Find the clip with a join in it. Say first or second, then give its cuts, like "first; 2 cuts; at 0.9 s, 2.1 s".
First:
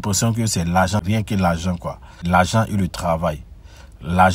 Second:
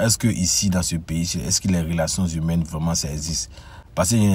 first; 1 cut; at 2.2 s